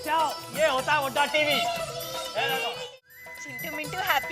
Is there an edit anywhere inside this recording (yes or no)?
yes